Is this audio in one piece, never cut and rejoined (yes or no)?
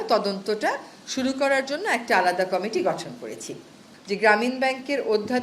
no